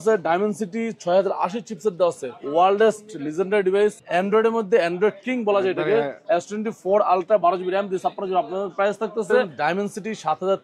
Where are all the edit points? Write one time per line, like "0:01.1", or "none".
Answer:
0:02.3
0:09.5